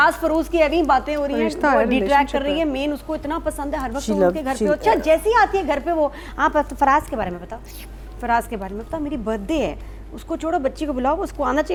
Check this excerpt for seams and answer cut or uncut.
uncut